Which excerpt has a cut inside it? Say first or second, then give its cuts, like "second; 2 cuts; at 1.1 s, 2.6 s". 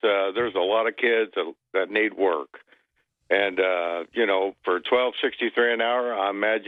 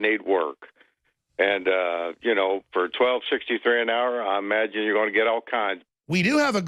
second; 1 cut; at 5.8 s